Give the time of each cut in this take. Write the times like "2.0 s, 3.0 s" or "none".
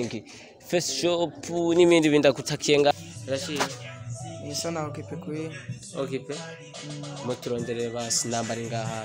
2.9 s